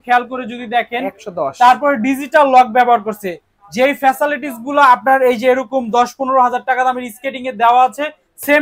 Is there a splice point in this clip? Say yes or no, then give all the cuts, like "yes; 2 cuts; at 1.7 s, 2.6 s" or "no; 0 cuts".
no; 0 cuts